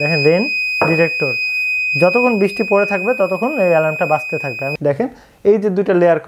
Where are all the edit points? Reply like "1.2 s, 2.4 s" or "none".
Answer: 4.6 s